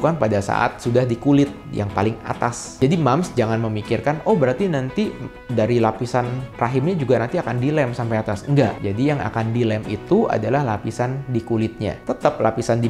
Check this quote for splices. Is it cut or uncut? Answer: uncut